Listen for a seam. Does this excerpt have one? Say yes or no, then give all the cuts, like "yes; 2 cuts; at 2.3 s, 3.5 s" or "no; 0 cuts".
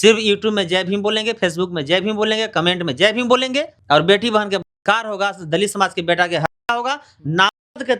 yes; 1 cut; at 3.8 s